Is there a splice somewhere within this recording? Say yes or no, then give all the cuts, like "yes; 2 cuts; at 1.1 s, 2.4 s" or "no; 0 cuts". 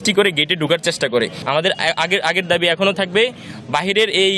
yes; 1 cut; at 1.4 s